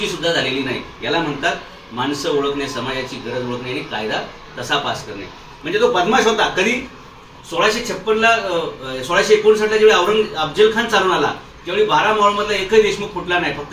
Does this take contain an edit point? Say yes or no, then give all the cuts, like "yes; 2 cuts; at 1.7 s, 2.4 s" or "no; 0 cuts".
yes; 1 cut; at 5.5 s